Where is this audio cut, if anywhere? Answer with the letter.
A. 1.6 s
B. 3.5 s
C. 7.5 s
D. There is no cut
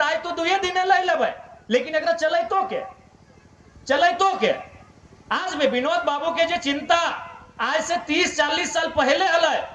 D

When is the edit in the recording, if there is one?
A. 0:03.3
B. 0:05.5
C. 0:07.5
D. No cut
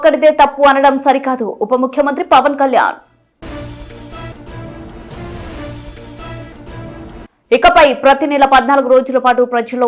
D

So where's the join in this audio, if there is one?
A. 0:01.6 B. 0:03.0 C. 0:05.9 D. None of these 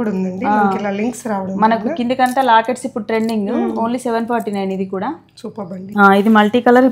C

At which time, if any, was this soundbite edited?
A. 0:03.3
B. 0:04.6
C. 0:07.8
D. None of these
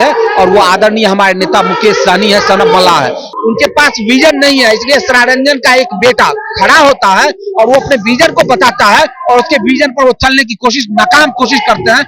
A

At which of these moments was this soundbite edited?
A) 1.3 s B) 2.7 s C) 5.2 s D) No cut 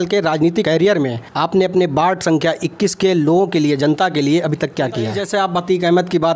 C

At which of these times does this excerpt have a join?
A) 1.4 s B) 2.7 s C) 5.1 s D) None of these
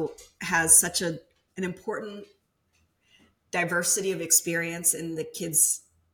A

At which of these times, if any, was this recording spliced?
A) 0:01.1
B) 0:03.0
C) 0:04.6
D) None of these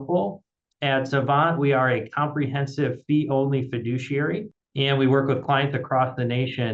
C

